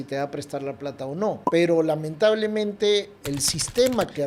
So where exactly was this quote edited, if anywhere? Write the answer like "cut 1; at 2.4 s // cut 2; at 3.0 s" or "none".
cut 1; at 1.4 s // cut 2; at 3.2 s